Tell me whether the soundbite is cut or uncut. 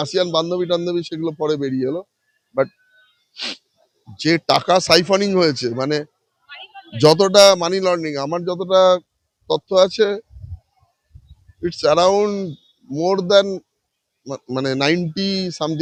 uncut